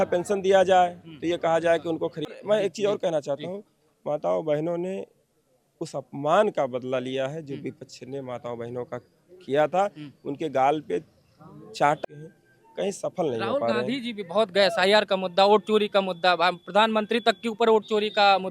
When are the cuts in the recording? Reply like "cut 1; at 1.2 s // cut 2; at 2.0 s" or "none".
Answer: cut 1; at 2.3 s // cut 2; at 12.0 s